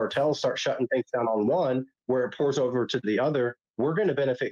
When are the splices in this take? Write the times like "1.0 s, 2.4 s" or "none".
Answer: none